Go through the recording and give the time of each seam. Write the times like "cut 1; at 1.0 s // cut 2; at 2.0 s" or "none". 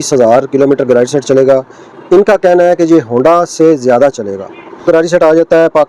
cut 1; at 4.8 s